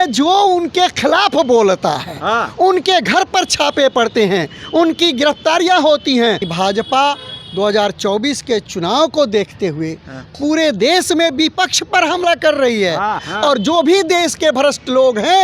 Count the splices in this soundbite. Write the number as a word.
two